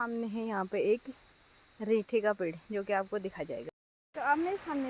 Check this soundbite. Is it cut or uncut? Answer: uncut